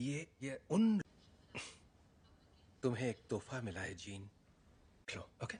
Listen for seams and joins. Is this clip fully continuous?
yes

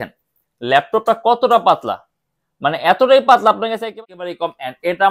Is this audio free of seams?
no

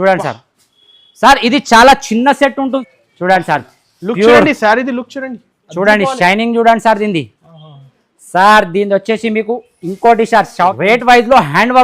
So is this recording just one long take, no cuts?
no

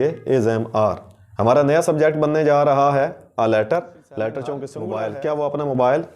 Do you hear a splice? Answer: yes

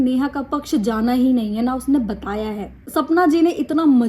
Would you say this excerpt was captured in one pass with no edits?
no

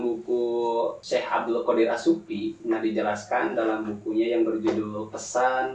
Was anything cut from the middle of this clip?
yes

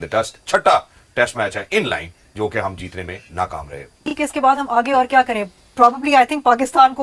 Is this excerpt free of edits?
no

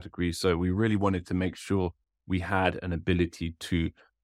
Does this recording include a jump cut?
no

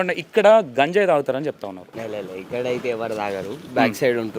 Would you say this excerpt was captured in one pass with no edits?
no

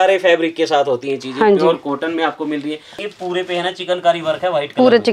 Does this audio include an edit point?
yes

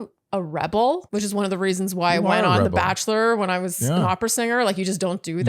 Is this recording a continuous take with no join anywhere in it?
no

